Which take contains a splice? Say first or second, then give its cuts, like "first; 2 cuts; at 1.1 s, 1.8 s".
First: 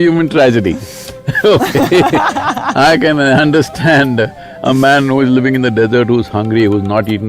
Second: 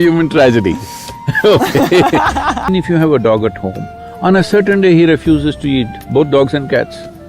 second; 1 cut; at 2.7 s